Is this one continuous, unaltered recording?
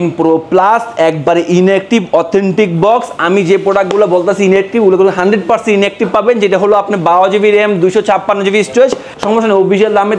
no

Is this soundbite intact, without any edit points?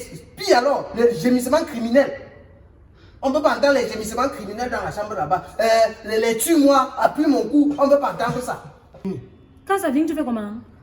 no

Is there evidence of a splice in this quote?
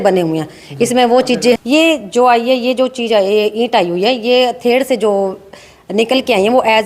yes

